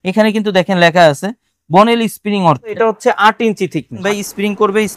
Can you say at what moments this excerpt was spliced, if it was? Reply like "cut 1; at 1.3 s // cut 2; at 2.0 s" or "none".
cut 1; at 2.8 s // cut 2; at 4.0 s